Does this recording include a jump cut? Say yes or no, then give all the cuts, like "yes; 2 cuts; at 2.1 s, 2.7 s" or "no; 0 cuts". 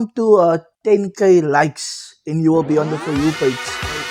no; 0 cuts